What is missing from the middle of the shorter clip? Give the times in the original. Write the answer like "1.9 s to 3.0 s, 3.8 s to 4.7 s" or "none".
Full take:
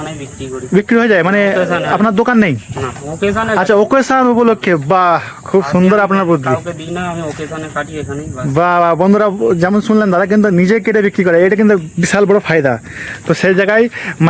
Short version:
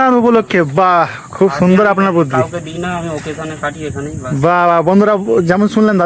none